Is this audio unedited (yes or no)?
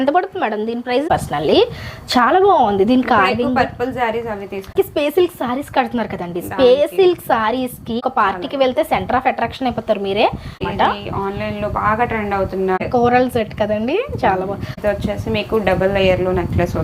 no